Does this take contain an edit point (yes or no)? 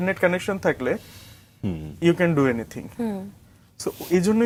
no